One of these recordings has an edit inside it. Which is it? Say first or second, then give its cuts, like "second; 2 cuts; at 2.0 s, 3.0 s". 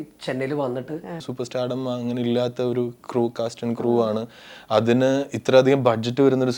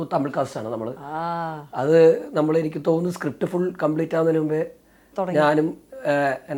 first; 1 cut; at 1.3 s